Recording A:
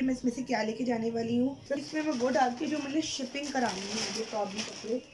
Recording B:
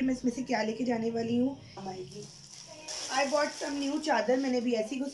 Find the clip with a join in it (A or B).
A